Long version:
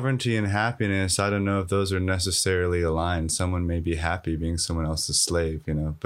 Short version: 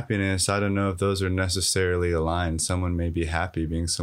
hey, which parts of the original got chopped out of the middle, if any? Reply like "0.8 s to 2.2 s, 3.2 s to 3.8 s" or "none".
none

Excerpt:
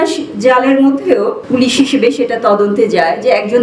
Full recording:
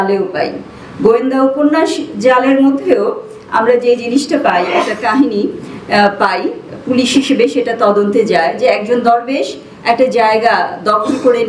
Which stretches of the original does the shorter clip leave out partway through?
3.2 s to 6.8 s

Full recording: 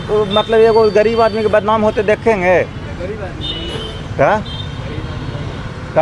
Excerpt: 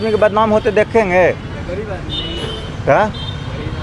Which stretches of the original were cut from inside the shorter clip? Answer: none

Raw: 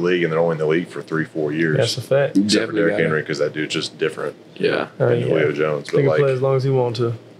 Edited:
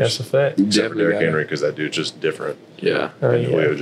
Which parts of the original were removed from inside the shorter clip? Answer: none

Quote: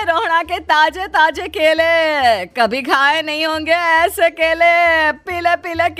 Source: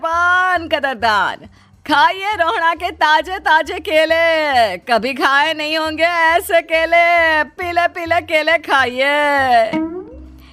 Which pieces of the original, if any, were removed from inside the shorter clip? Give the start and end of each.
none

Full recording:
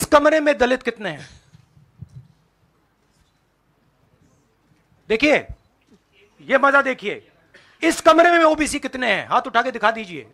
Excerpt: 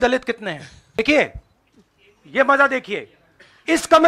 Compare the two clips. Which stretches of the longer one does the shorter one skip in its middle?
1.6 s to 5.1 s

